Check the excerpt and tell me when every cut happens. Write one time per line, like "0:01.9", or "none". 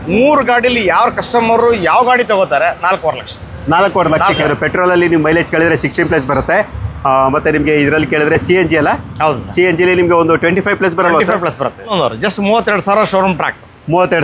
0:04.4
0:11.9